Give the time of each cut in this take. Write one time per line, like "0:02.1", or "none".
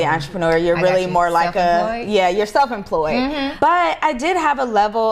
0:03.5